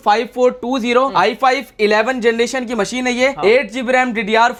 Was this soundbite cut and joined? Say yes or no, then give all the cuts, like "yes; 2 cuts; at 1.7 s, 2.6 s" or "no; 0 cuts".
no; 0 cuts